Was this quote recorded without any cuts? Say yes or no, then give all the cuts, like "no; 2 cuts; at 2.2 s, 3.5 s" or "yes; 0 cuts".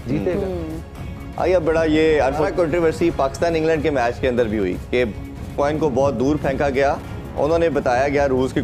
yes; 0 cuts